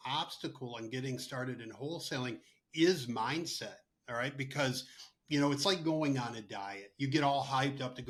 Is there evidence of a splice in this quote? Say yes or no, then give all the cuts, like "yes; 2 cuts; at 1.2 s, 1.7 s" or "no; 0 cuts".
no; 0 cuts